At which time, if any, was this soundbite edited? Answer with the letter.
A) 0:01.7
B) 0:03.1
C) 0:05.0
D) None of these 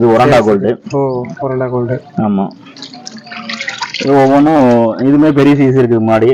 D